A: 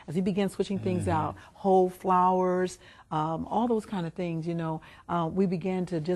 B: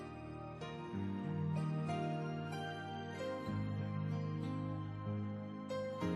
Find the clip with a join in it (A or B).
A